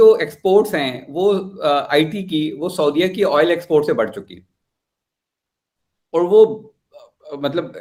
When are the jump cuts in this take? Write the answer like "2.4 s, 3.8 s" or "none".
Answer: none

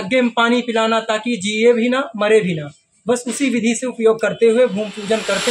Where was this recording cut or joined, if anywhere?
none

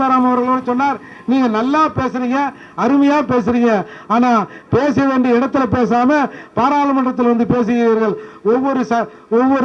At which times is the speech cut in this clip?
none

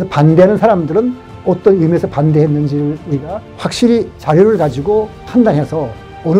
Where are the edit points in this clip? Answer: 3.9 s, 5.2 s

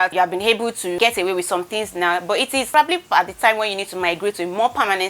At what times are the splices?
none

